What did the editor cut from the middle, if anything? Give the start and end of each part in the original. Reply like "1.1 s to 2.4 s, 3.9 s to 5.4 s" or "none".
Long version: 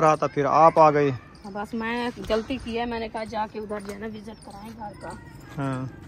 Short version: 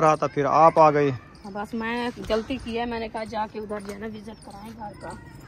none